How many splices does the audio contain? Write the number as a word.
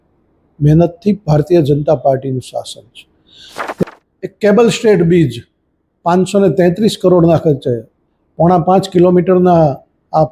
one